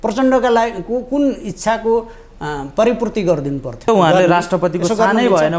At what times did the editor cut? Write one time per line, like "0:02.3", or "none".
0:03.9